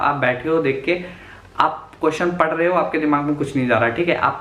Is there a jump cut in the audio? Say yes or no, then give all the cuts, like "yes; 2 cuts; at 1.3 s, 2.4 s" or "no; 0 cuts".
no; 0 cuts